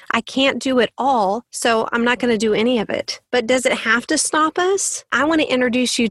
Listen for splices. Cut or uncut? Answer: cut